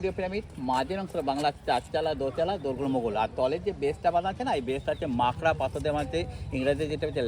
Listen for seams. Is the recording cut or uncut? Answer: uncut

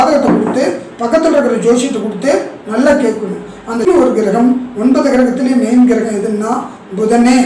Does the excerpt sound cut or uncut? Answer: cut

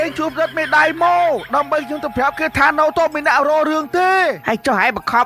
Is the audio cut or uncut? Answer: uncut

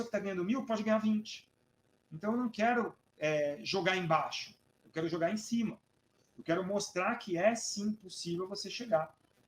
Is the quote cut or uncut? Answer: uncut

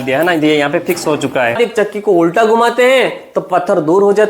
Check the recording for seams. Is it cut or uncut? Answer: cut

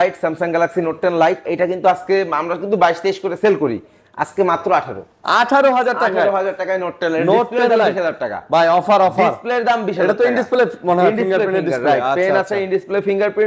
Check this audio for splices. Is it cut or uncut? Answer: uncut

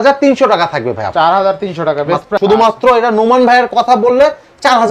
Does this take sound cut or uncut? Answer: cut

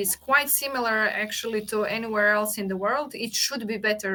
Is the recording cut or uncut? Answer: uncut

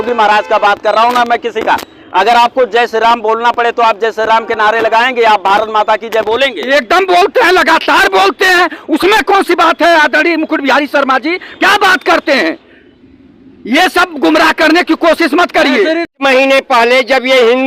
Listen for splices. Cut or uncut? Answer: cut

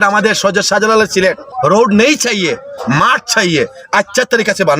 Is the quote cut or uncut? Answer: cut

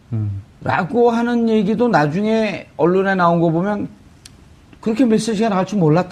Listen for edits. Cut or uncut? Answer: uncut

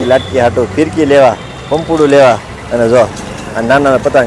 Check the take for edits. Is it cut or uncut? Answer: uncut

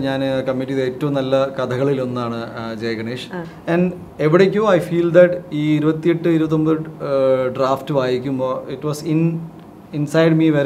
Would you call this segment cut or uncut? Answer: uncut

